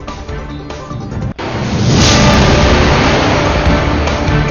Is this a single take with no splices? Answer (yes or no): no